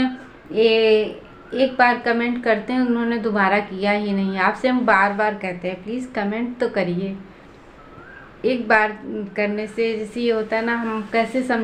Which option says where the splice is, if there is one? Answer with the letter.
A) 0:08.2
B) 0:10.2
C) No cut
C